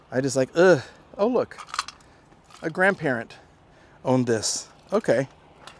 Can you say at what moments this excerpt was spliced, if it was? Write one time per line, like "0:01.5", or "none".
none